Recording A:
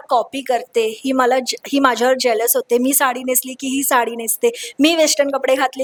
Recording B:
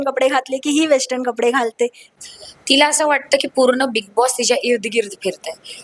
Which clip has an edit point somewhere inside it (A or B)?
B